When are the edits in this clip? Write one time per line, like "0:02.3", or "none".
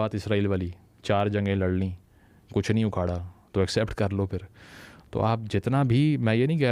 none